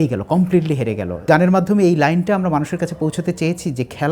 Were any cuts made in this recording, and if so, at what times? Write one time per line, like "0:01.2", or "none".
0:01.2